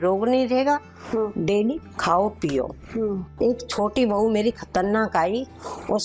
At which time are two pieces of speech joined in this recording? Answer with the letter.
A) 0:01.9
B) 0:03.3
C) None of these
B